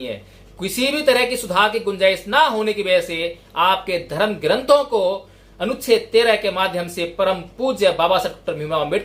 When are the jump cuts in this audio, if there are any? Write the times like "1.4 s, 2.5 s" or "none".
none